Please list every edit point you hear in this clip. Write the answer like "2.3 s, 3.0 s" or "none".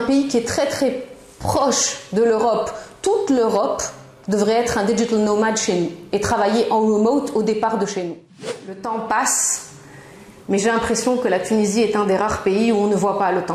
8.8 s